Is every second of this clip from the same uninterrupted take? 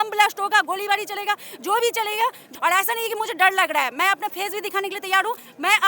no; 1 cut; at 2.4 s

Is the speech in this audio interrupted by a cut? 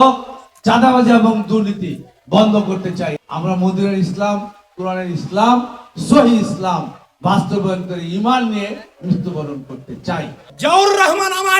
yes; 2 cuts; at 3.2 s, 10.4 s

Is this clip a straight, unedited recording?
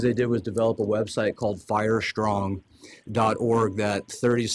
yes; 0 cuts

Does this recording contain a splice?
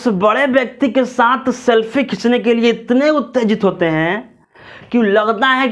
no; 0 cuts

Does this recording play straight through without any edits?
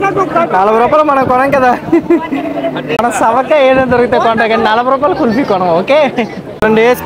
yes; 0 cuts

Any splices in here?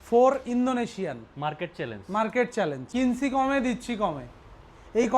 yes; 1 cut; at 2.9 s

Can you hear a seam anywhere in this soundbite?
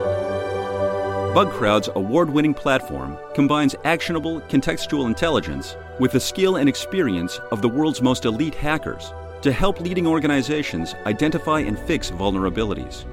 yes; 1 cut; at 1.2 s

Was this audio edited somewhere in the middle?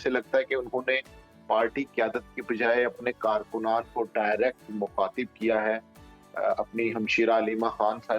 no; 0 cuts

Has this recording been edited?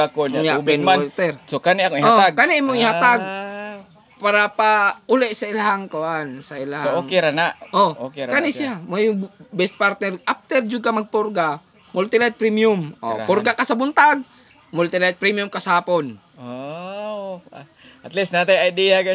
no; 0 cuts

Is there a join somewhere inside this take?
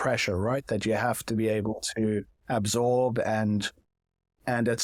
no; 0 cuts

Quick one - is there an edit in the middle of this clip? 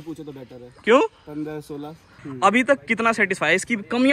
yes; 1 cut; at 2.1 s

